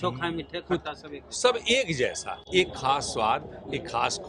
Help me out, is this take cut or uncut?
uncut